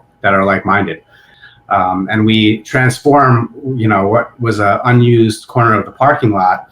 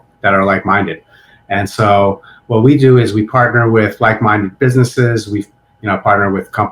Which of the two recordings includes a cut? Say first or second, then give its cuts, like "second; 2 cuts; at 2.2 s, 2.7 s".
first; 1 cut; at 1.3 s